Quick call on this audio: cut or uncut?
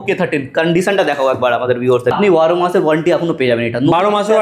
cut